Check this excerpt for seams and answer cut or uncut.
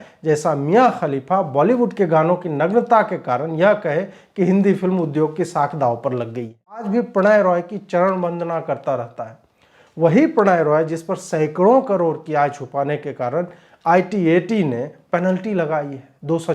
cut